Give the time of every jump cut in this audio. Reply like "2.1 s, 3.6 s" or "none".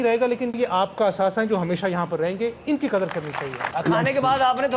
3.6 s